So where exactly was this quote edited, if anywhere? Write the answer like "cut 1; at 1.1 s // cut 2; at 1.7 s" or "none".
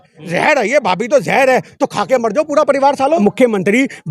cut 1; at 3.2 s